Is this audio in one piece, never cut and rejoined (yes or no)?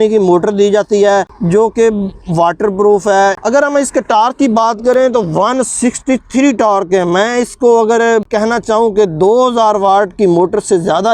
yes